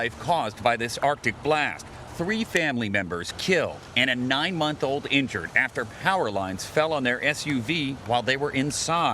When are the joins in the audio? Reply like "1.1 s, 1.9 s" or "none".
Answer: 8.2 s